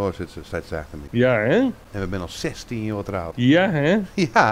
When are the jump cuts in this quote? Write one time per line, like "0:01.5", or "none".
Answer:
0:01.0
0:01.8
0:03.3

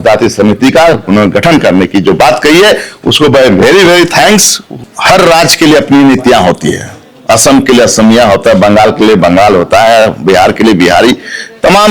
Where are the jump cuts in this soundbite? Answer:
0:04.8

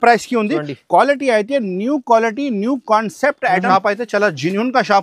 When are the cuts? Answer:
0:03.7

